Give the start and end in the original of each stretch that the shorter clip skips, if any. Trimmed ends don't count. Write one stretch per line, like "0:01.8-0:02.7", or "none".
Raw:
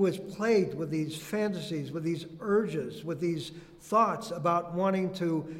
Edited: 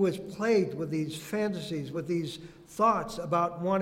0:01.9-0:03.0